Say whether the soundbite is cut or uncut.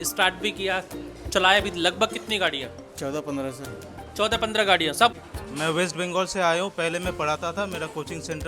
cut